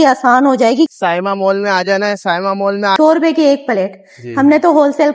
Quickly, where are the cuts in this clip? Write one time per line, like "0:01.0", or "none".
0:00.9
0:02.9